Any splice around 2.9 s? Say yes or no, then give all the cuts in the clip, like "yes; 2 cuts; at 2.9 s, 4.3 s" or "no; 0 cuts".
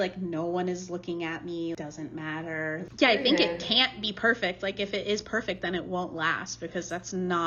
yes; 2 cuts; at 1.8 s, 2.9 s